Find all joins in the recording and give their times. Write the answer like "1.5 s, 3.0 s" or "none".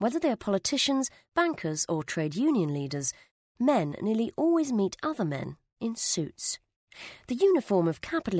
none